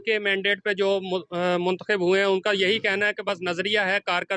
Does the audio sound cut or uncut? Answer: uncut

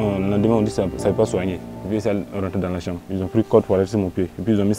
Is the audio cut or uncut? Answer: cut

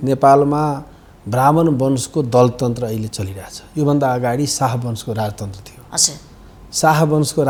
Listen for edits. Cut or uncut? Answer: uncut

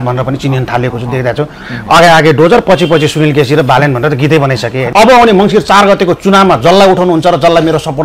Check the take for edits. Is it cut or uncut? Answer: cut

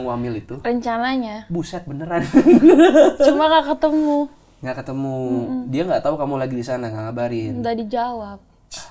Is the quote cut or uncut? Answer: uncut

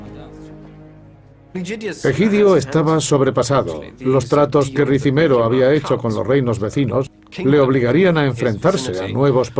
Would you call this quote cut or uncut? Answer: cut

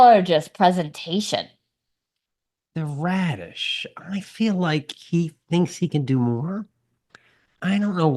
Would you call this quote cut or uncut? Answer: uncut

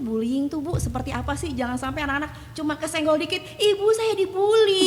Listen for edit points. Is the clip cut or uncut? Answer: uncut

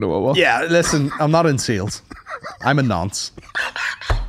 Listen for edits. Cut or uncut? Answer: uncut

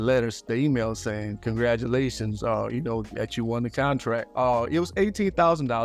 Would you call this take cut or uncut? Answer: uncut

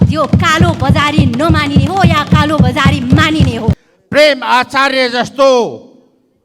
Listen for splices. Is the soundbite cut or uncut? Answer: cut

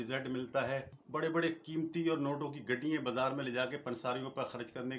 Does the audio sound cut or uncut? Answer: cut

